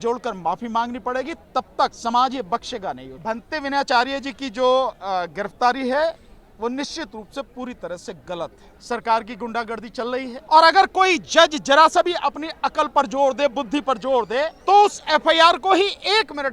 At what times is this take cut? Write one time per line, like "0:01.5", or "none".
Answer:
0:02.0
0:03.1
0:08.7
0:10.4
0:14.6